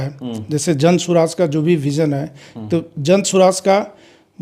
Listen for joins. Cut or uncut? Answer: uncut